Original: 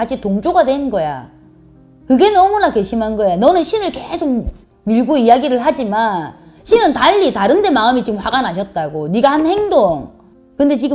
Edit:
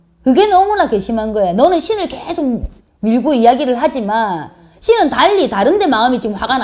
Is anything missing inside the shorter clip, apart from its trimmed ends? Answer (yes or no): no